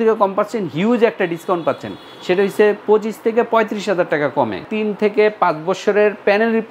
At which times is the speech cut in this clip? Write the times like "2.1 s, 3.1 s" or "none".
4.6 s

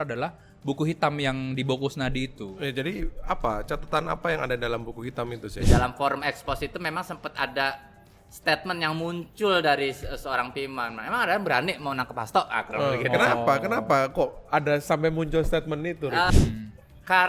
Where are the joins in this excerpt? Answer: 5.7 s, 16.3 s

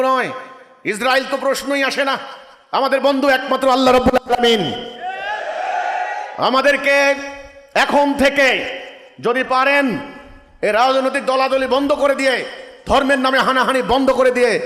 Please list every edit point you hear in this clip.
none

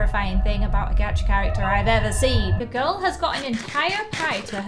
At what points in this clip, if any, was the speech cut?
2.6 s

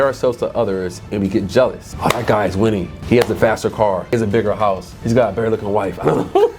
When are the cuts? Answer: 1.9 s, 2.9 s, 4.1 s, 4.9 s

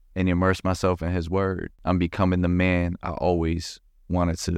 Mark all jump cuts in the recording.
1.7 s

